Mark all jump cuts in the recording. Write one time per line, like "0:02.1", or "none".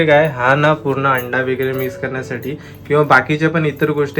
none